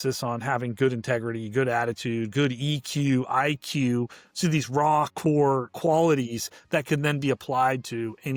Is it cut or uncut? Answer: uncut